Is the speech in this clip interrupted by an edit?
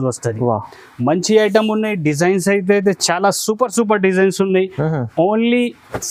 no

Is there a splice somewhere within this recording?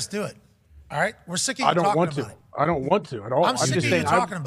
no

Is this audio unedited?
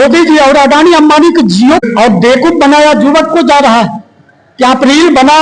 no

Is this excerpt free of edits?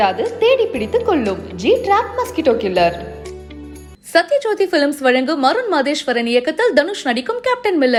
yes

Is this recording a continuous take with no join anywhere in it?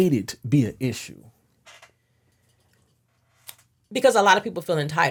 yes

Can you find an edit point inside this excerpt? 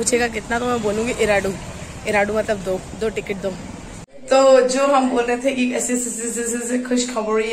no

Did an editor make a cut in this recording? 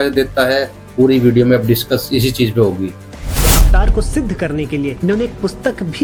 no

